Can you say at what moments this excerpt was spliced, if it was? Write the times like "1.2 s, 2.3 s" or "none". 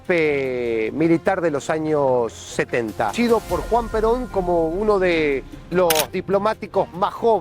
3.1 s